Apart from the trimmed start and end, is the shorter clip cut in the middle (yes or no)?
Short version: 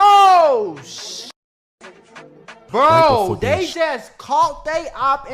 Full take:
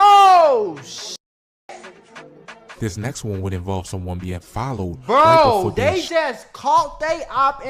yes